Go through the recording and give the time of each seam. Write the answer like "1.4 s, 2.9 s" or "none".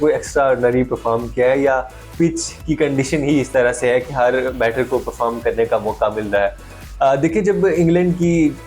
none